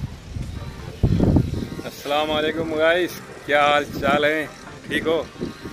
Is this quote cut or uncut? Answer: uncut